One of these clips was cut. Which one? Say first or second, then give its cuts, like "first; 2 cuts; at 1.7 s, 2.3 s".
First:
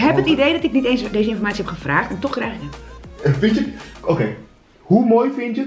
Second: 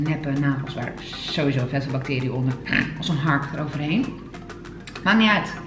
second; 1 cut; at 2.6 s